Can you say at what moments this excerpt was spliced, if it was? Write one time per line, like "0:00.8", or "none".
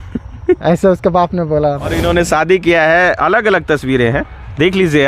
0:02.0